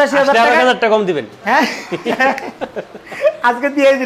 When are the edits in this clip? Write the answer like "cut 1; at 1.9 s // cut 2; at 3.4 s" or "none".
none

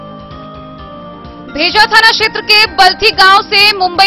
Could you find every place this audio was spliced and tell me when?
cut 1; at 1.1 s

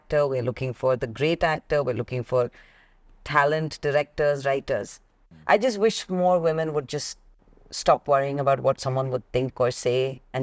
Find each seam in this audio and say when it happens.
cut 1; at 5.3 s

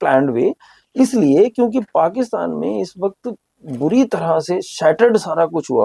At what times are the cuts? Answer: none

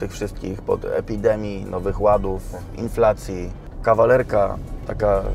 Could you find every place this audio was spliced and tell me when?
cut 1; at 3.7 s

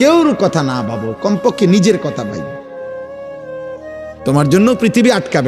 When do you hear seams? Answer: cut 1; at 2.4 s // cut 2; at 3.9 s

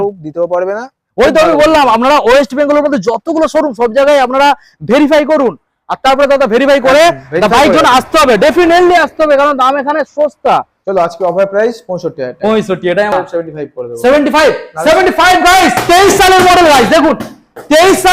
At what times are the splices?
cut 1; at 10.8 s // cut 2; at 13.1 s

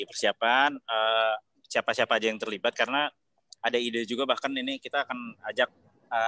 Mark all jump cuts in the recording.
cut 1; at 1.5 s

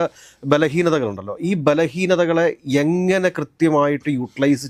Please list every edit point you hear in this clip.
none

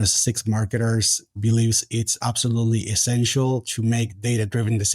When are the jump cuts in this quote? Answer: cut 1; at 1.3 s

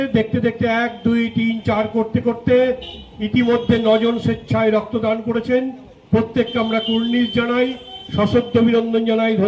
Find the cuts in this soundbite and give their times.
none

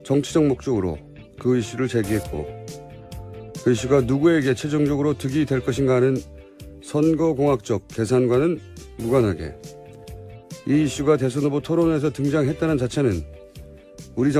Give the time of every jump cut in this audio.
none

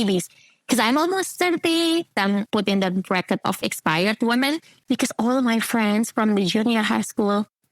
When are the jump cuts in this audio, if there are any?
cut 1; at 2.4 s // cut 2; at 3.6 s

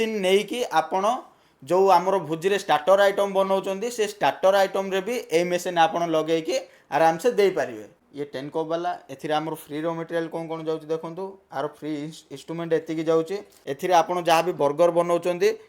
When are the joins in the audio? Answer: cut 1; at 7.8 s // cut 2; at 13.7 s

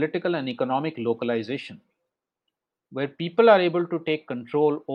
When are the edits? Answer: none

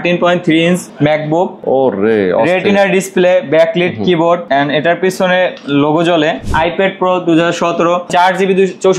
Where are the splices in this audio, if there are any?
cut 1; at 1.4 s // cut 2; at 4.4 s // cut 3; at 6.4 s // cut 4; at 8.1 s

